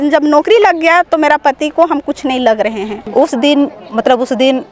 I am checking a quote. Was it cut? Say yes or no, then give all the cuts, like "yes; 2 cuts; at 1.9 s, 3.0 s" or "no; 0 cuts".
yes; 1 cut; at 3.0 s